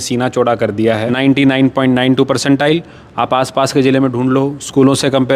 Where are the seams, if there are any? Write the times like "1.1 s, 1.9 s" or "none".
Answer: 1.1 s